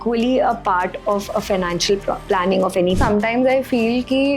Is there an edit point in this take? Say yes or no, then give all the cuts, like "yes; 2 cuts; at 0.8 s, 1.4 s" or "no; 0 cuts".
yes; 1 cut; at 3.0 s